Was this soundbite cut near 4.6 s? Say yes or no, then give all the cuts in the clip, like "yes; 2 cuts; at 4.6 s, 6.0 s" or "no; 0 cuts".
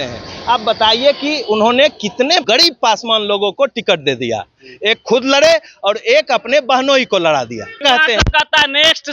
no; 2 cuts; at 2.4 s, 7.8 s